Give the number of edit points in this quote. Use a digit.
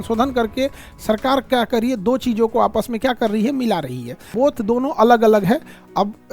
1